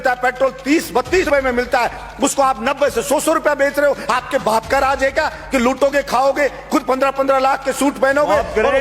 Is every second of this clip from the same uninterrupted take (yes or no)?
no